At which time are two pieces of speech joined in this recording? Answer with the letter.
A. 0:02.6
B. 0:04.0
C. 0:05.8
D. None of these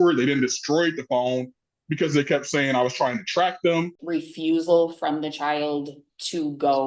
B